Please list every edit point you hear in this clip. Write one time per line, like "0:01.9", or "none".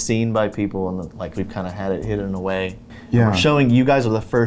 0:01.3
0:02.9

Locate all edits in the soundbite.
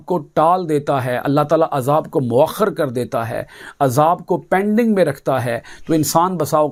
none

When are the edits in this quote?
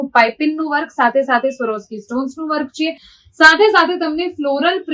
none

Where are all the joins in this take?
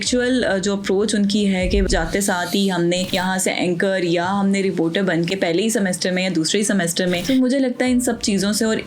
0:01.9
0:07.2

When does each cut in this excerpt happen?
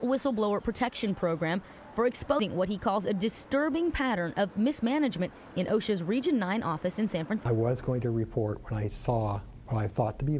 0:02.4
0:07.4

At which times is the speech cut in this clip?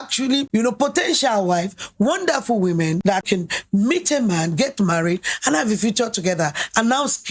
none

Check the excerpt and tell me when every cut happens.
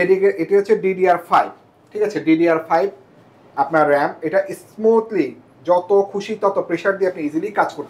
none

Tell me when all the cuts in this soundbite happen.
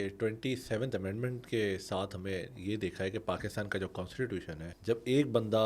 0:04.6

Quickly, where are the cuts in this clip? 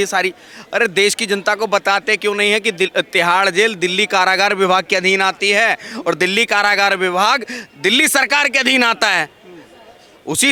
none

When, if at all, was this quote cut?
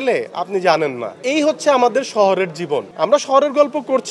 0:02.9

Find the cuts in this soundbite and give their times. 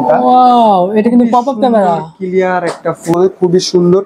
0:03.1

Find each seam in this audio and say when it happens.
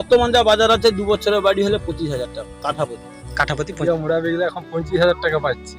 0:03.8

